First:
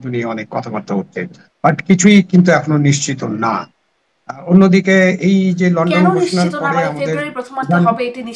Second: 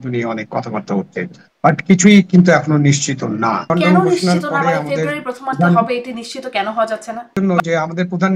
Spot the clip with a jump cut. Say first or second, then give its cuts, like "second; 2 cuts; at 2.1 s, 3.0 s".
second; 2 cuts; at 3.7 s, 7.3 s